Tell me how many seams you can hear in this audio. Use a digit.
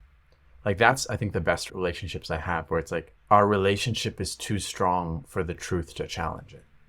2